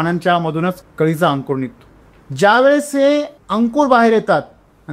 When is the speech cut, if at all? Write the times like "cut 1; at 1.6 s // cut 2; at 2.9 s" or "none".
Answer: cut 1; at 3.4 s